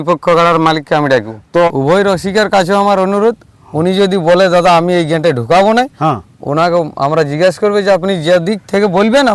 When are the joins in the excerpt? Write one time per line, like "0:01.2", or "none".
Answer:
0:01.7